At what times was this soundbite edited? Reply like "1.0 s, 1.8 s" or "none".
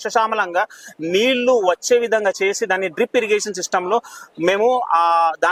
none